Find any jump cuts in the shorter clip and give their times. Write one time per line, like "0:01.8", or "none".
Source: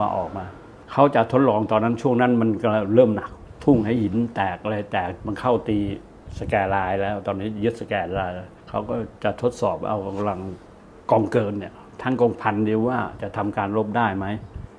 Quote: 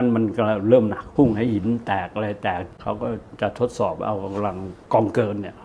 0:01.0
0:02.8
0:04.7